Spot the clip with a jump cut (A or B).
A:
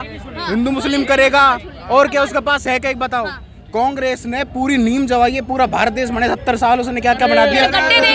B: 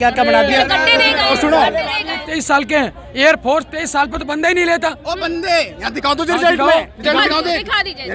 B